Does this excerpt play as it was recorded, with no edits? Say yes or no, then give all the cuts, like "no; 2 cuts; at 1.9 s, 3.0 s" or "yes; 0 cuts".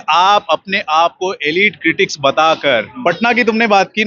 no; 1 cut; at 2.9 s